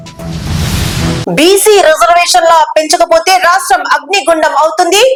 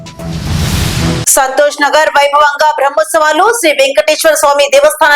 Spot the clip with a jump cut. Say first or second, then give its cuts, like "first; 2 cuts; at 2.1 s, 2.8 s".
second; 1 cut; at 1.2 s